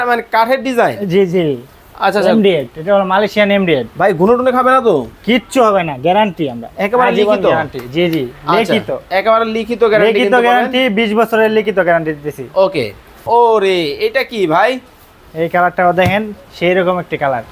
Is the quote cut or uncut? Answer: cut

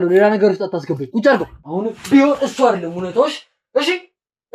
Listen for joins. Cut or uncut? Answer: cut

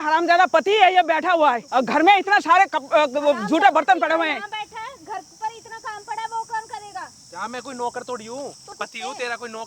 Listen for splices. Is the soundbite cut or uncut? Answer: cut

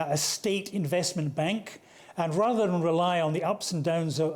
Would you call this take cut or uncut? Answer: uncut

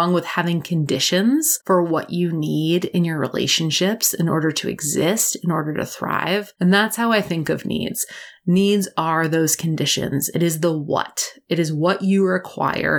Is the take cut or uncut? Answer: cut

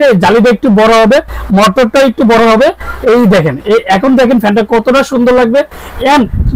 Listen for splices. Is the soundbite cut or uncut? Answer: uncut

